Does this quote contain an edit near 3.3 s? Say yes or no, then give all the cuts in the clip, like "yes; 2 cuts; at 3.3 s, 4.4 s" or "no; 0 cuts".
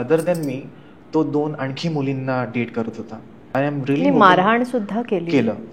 yes; 1 cut; at 3.3 s